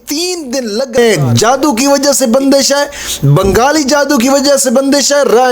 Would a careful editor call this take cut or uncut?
cut